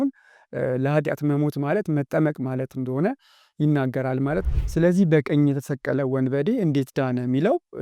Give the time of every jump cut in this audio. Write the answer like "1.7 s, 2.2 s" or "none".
4.4 s

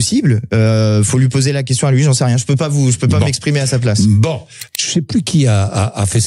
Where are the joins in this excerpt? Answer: 4.5 s

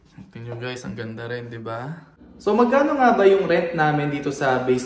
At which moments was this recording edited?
2.3 s

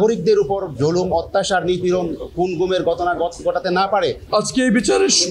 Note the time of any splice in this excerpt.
4.2 s

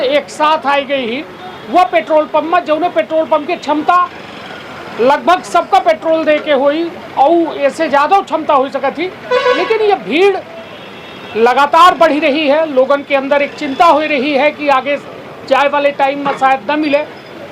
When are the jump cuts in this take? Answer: none

